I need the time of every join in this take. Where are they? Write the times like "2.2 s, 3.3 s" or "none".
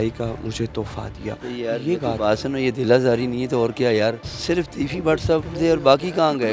4.3 s

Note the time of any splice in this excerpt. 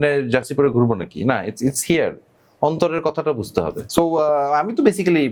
none

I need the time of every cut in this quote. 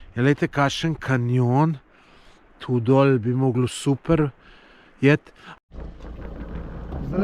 5.4 s

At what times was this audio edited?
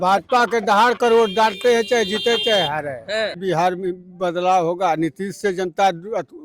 3.4 s

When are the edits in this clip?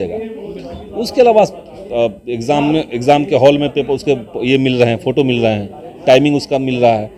none

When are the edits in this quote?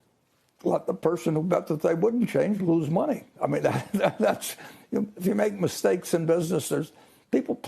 none

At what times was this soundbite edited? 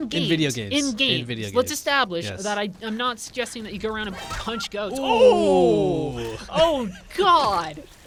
none

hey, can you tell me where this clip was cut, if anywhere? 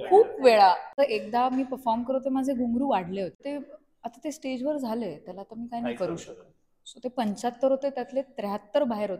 0.9 s, 3.4 s

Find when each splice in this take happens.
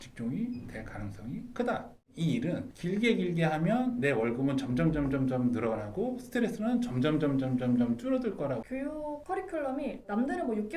2.1 s, 8.6 s

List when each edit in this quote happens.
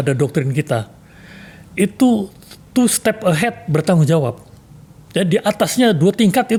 none

